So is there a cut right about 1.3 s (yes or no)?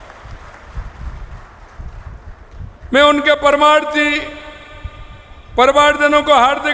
no